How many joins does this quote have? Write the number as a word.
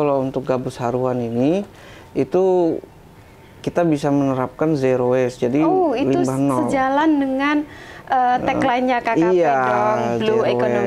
zero